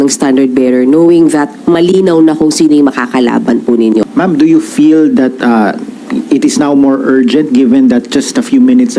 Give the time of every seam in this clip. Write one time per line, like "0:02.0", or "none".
0:04.1